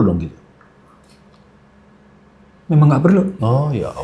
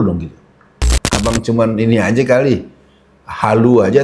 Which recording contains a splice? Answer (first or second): second